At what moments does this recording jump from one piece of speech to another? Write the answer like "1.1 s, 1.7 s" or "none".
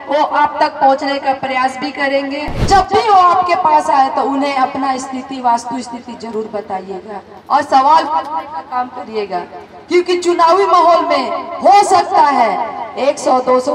2.7 s